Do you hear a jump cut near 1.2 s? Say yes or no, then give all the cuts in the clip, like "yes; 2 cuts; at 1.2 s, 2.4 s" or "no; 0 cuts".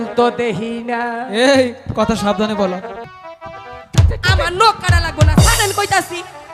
no; 1 cut; at 2.9 s